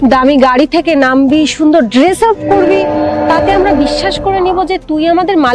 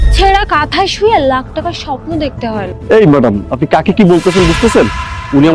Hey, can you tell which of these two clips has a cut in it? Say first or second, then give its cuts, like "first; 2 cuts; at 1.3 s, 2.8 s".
second; 1 cut; at 2.7 s